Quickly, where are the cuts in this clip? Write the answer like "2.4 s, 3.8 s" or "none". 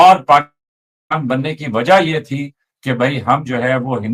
none